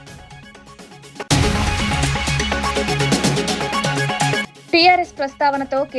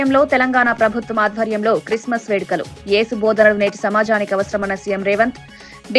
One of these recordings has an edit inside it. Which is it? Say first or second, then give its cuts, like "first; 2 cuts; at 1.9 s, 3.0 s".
first; 1 cut; at 1.0 s